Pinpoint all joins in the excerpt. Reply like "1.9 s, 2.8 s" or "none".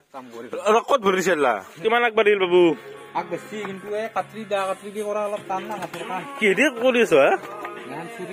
1.7 s